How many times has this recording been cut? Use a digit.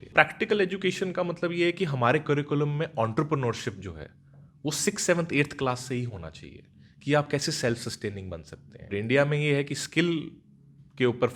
1